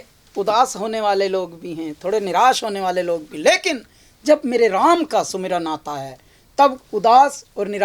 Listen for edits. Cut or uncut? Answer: uncut